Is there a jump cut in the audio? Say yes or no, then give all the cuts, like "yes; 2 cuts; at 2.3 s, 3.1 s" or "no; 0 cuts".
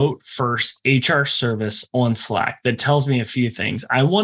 no; 0 cuts